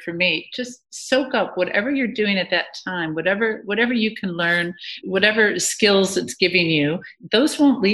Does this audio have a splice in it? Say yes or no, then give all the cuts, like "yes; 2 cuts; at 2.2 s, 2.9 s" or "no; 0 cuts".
no; 0 cuts